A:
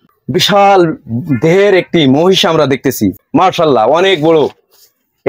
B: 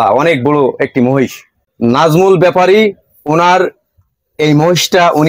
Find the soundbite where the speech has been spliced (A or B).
A